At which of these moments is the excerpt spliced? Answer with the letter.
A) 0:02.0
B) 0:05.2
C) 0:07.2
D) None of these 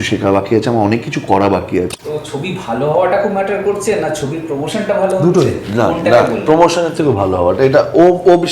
A